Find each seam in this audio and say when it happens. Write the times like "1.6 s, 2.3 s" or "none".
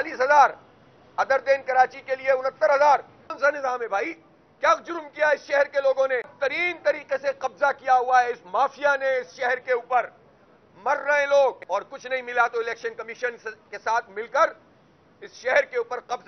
3.4 s, 6.3 s, 11.6 s